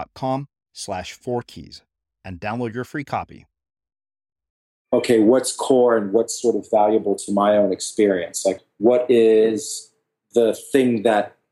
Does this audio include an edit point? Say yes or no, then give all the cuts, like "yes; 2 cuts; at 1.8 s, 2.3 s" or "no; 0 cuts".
yes; 2 cuts; at 4.8 s, 8.6 s